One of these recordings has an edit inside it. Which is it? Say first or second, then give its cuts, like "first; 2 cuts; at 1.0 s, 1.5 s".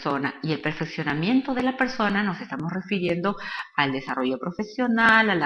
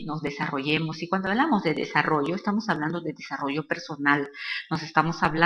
second; 1 cut; at 2.4 s